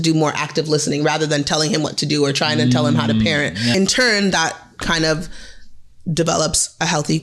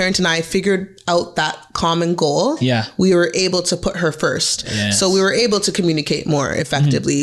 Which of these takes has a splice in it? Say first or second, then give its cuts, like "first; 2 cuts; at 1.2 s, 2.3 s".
first; 1 cut; at 3.7 s